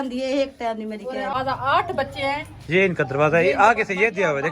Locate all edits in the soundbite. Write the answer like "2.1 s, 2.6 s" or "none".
1.3 s